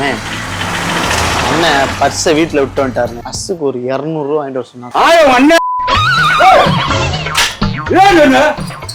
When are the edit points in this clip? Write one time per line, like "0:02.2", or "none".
0:03.3